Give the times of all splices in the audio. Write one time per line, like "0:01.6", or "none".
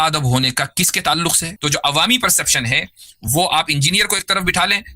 0:01.5